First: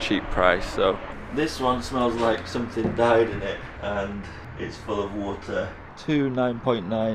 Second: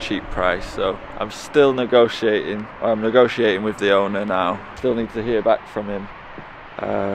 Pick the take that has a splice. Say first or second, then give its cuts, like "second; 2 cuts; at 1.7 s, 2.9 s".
first; 4 cuts; at 1.1 s, 3.7 s, 4.4 s, 5.9 s